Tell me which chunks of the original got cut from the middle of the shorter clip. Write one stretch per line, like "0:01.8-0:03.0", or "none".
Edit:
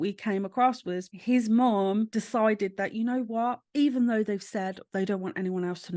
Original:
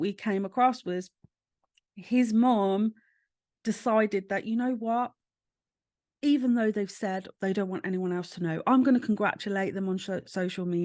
0:01.1-0:01.9
0:02.9-0:03.6
0:05.2-0:06.1